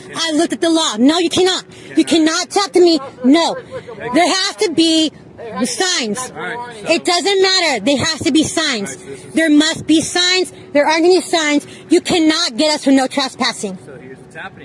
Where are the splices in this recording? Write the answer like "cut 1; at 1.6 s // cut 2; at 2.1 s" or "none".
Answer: none